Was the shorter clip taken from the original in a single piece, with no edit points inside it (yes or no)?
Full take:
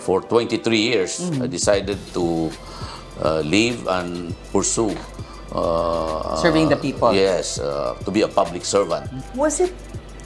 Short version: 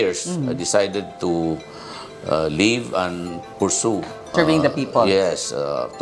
no